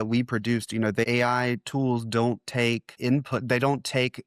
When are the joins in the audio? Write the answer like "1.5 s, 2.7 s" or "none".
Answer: 1.1 s, 2.9 s